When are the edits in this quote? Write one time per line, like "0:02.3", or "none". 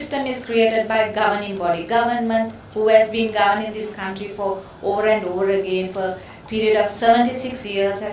none